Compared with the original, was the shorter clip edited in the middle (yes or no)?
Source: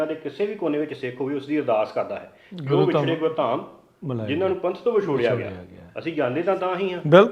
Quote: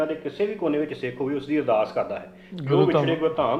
no